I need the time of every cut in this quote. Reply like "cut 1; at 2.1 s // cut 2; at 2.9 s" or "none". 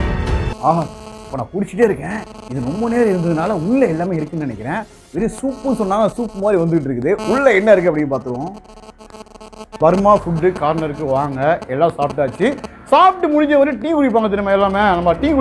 cut 1; at 9.7 s